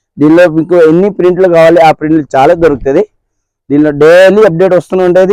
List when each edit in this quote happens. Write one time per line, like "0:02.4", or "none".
none